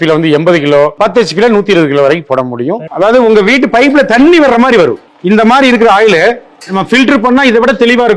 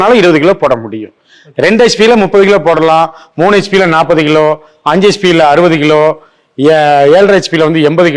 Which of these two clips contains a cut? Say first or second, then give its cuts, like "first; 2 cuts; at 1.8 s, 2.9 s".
first; 2 cuts; at 2.8 s, 5.1 s